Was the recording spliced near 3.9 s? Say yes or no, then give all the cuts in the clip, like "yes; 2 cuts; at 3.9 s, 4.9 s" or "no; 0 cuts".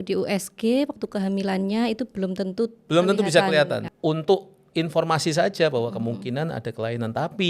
yes; 1 cut; at 3.9 s